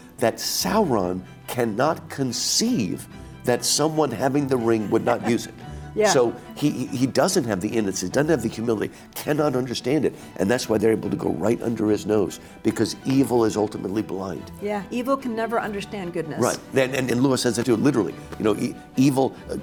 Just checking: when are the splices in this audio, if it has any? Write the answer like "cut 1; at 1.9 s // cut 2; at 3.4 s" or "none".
none